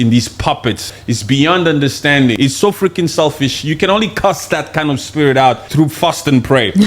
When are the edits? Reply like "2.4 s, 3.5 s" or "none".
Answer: 0.9 s, 2.4 s, 5.6 s